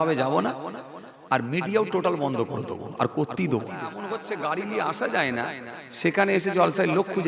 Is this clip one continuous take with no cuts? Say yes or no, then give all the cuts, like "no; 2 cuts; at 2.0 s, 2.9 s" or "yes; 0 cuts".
no; 1 cut; at 4.2 s